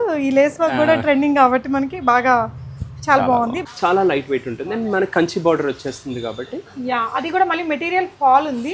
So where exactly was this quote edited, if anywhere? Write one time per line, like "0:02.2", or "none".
0:03.6